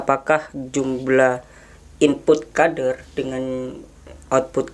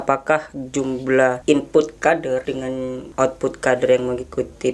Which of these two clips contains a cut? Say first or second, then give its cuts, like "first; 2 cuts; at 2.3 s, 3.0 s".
second; 2 cuts; at 1.4 s, 2.6 s